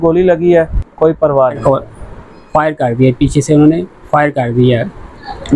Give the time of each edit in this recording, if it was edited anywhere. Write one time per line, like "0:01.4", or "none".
0:01.6